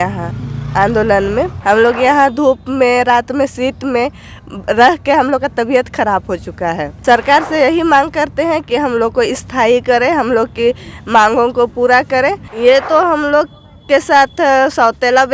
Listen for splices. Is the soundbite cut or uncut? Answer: cut